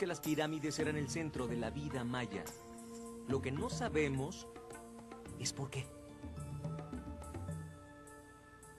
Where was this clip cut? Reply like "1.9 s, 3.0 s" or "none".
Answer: 1.5 s